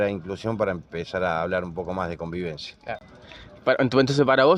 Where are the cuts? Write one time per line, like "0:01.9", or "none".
none